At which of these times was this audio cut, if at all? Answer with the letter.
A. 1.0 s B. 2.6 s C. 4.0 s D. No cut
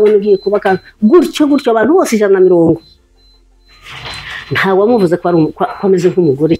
D